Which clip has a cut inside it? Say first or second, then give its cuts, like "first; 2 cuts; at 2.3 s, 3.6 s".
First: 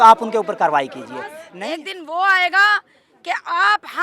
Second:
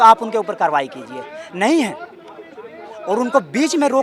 first; 1 cut; at 1.4 s